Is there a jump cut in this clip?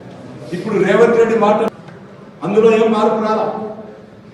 yes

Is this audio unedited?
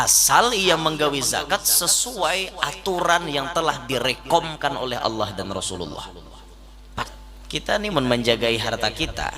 no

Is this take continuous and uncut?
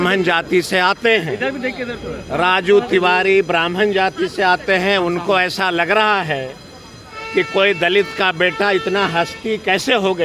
yes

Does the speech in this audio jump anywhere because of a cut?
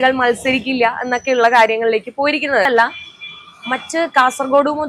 yes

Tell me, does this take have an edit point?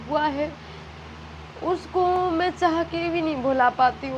no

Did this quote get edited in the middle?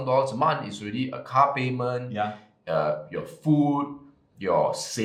no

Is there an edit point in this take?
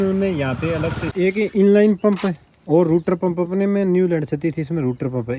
yes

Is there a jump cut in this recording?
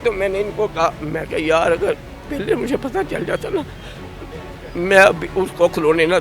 no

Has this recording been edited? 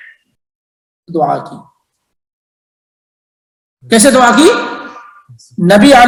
no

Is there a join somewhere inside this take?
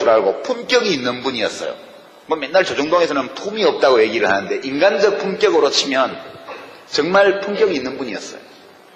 yes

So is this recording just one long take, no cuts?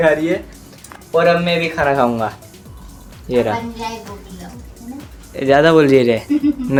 yes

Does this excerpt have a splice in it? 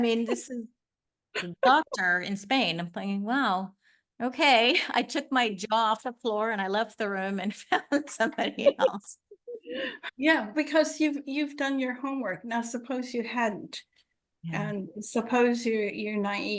yes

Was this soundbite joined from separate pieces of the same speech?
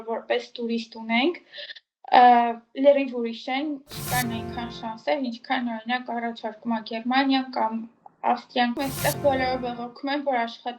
yes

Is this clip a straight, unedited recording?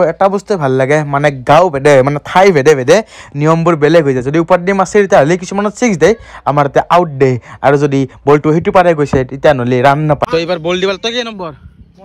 yes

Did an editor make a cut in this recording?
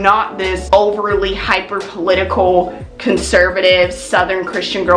no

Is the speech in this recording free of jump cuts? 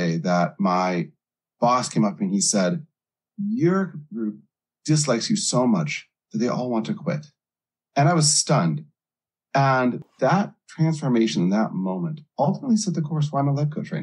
no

